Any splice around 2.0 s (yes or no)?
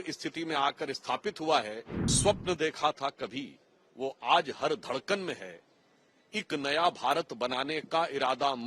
yes